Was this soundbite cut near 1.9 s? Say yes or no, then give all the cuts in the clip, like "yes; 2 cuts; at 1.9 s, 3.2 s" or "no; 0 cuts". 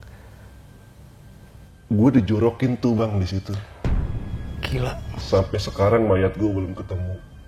no; 0 cuts